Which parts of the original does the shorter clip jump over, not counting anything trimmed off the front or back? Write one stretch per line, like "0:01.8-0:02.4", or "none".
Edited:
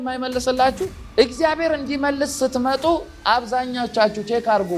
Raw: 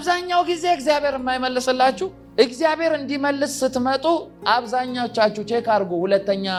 none